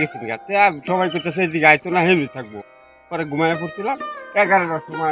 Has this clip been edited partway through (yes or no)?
no